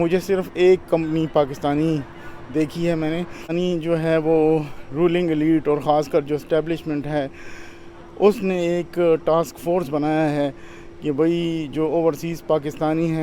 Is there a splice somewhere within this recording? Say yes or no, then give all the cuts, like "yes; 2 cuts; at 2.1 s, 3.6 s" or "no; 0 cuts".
yes; 1 cut; at 3.5 s